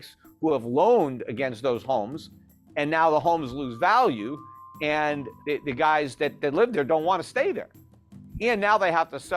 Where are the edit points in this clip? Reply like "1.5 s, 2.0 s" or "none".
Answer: 5.3 s